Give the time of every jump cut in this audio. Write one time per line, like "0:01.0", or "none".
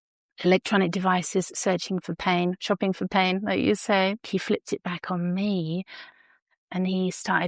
0:04.2
0:06.0